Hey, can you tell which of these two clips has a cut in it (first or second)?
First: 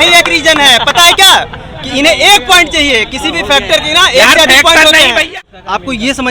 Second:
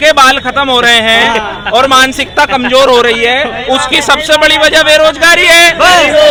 first